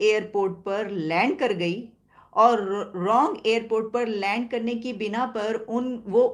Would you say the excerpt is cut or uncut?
uncut